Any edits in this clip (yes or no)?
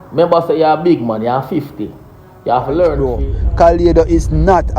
yes